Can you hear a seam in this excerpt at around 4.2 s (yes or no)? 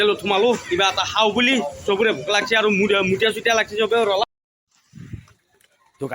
yes